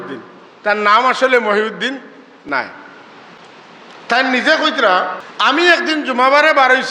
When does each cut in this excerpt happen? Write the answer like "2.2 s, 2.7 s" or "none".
5.2 s